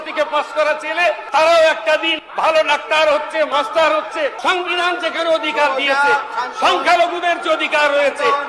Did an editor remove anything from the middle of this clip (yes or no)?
yes